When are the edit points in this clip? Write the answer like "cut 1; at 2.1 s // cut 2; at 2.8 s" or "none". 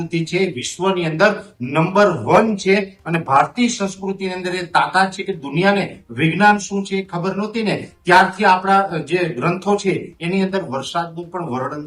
none